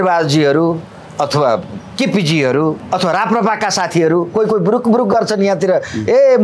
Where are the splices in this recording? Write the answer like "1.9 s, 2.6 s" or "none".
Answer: 2.8 s